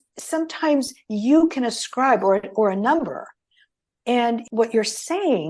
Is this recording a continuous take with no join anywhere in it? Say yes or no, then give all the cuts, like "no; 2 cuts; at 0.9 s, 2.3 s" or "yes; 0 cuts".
no; 1 cut; at 4.4 s